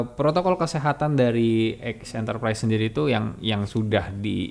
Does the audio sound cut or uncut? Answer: uncut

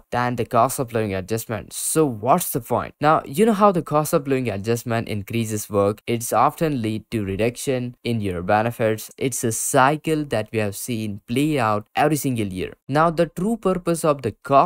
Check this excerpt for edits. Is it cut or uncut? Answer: cut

